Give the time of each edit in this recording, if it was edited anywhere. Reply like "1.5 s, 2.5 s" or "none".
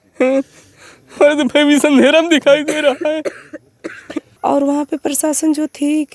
4.2 s